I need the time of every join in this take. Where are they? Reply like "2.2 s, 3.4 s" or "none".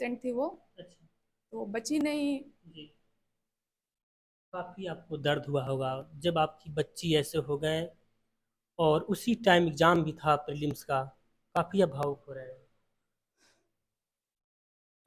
none